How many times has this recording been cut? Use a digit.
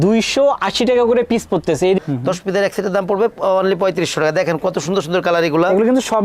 1